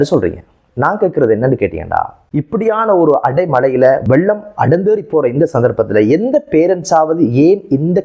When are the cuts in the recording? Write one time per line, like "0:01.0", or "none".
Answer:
0:02.2
0:04.1